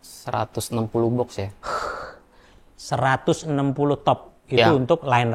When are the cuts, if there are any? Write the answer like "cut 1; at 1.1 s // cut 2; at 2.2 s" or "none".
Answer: none